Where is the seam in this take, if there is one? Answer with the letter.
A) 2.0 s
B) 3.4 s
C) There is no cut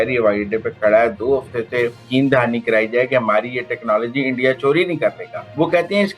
A